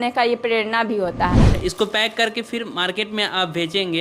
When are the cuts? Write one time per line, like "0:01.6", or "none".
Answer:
0:01.5